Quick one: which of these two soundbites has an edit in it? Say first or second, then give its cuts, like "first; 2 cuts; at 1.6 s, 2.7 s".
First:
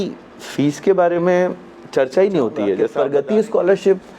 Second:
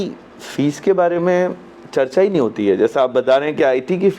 first; 1 cut; at 2.9 s